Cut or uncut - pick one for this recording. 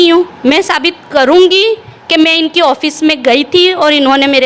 uncut